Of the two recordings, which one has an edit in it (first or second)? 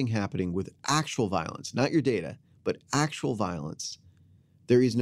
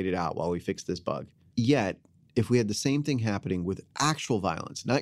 second